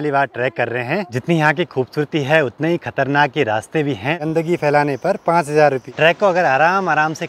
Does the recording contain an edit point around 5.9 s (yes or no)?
yes